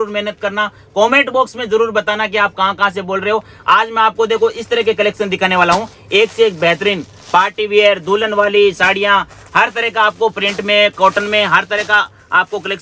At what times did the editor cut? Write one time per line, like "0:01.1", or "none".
none